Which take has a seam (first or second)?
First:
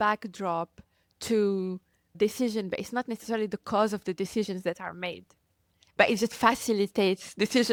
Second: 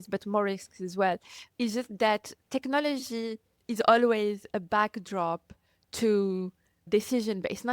second